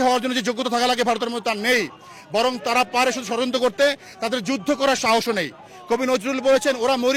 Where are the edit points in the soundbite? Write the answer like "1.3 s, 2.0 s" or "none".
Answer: none